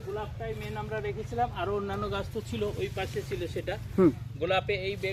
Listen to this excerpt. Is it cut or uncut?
uncut